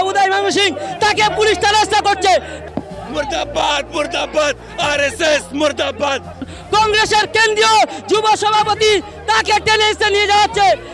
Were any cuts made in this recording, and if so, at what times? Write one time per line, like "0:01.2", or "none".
0:02.6
0:06.5